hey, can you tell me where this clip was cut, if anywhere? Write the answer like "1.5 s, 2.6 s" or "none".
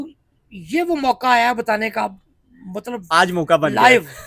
none